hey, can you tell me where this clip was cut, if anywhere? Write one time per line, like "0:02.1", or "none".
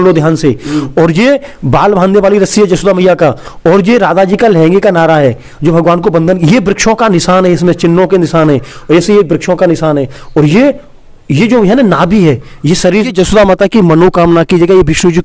0:13.1